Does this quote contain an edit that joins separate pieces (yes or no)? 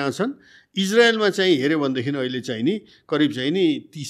no